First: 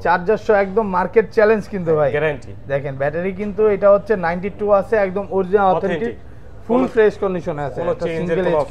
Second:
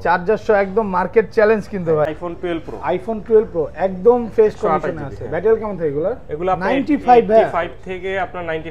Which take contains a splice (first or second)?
second